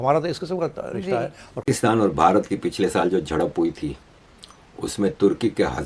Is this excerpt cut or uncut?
cut